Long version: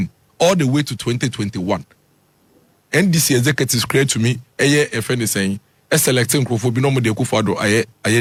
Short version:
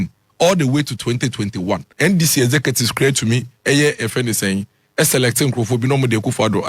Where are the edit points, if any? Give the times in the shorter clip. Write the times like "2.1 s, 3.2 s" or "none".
1.9 s